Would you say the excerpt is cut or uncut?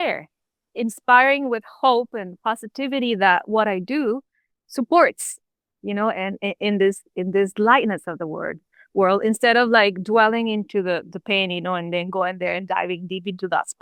uncut